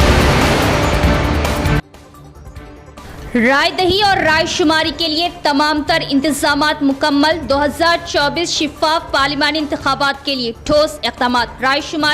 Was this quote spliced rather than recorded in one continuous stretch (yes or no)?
yes